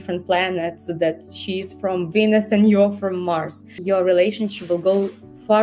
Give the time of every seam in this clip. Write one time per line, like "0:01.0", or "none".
0:03.7